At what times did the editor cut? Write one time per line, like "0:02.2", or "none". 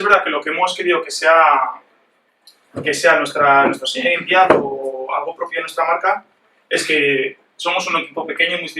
0:03.9